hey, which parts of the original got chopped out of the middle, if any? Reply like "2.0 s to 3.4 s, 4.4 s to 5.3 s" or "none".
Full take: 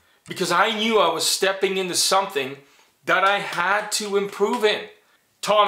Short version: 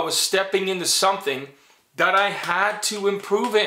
none